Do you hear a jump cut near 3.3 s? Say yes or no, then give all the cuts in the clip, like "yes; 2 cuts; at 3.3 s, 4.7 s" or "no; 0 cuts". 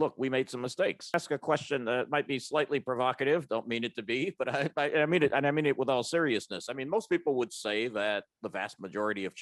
no; 1 cut; at 1.1 s